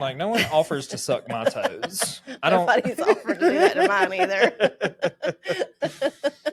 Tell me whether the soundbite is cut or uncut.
uncut